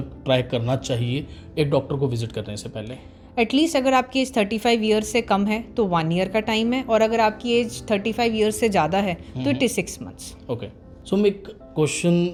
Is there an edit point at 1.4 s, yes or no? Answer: no